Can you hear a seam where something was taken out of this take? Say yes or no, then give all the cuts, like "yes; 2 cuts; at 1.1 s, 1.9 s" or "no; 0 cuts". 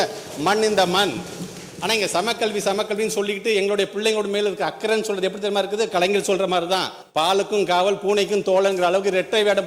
yes; 1 cut; at 7.0 s